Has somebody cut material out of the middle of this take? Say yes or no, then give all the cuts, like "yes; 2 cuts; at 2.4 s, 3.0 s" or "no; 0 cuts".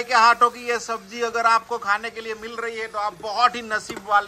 no; 0 cuts